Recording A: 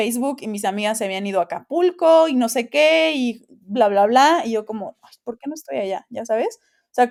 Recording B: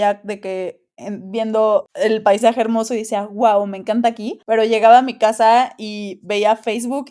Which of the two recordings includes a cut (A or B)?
B